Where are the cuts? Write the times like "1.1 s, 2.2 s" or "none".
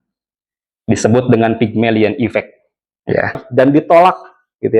3.4 s